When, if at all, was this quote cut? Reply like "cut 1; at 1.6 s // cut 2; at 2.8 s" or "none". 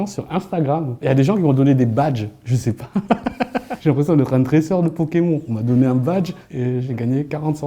cut 1; at 0.9 s